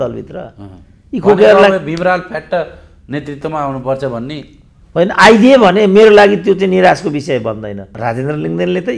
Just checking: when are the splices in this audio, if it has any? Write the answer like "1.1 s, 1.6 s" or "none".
7.9 s